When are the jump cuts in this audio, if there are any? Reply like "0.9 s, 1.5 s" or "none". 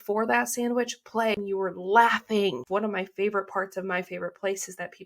1.4 s, 2.6 s